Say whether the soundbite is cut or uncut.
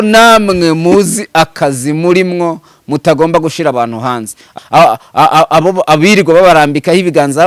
cut